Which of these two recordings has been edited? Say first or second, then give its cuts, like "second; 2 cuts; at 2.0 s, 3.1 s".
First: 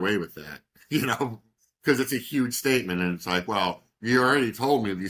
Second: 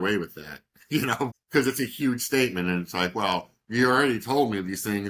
second; 1 cut; at 1.4 s